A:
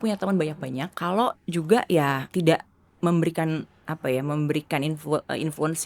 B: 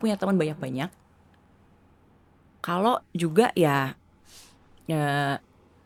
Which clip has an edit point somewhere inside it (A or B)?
A